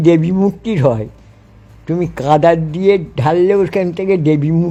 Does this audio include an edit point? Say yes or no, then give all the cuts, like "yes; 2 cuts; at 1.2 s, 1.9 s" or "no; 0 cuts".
no; 0 cuts